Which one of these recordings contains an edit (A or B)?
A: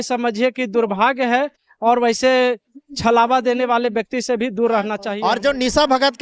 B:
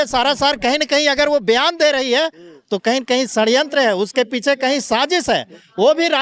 A